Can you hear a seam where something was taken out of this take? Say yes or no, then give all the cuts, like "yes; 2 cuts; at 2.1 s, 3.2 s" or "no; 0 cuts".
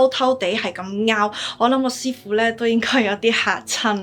no; 0 cuts